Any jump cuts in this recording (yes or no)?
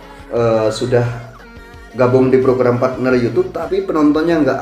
yes